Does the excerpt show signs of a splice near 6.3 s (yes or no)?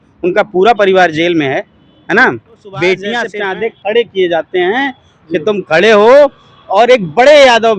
no